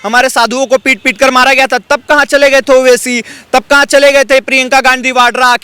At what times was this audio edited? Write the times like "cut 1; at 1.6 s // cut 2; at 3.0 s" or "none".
none